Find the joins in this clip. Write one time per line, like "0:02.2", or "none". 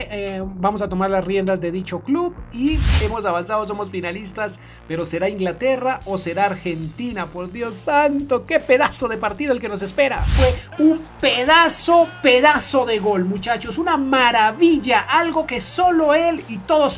0:02.9
0:10.3